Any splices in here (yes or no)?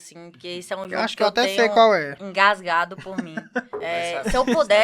yes